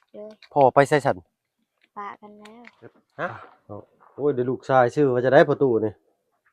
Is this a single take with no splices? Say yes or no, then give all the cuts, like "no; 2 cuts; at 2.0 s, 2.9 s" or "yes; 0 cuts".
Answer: no; 1 cut; at 3.3 s